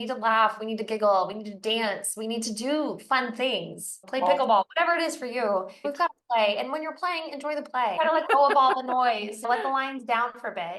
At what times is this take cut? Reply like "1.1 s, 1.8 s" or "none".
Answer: 4.0 s, 5.8 s, 7.9 s, 9.5 s